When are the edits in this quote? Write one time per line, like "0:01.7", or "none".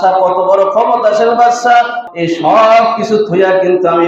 0:02.0

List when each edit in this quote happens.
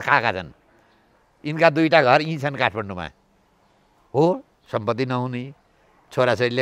none

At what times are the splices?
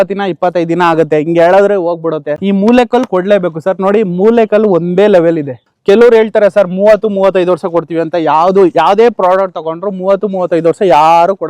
0:02.3
0:05.6

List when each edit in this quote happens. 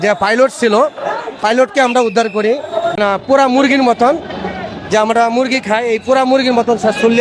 0:03.0

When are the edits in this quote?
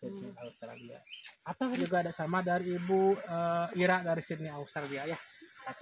0:01.9

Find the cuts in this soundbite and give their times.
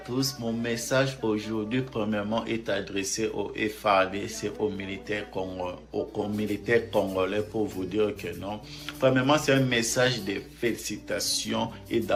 none

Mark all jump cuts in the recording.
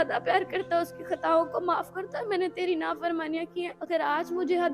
0:03.8

